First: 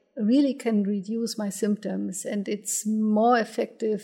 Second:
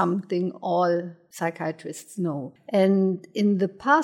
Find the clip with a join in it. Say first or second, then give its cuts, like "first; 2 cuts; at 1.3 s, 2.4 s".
second; 2 cuts; at 1.2 s, 2.5 s